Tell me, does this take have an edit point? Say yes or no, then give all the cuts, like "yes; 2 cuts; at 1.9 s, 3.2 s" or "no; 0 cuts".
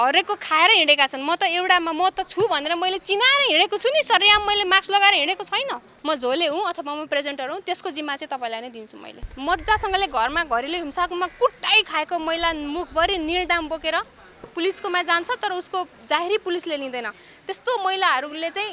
yes; 2 cuts; at 5.9 s, 9.2 s